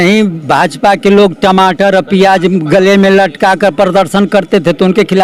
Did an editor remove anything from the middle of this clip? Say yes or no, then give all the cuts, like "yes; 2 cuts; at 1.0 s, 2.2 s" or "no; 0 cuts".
no; 0 cuts